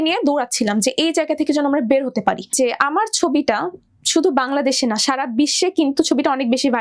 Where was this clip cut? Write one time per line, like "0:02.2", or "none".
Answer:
0:02.6